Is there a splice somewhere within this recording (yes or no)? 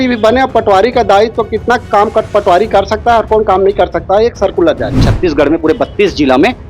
yes